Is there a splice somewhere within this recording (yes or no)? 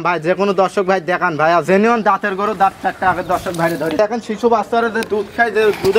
yes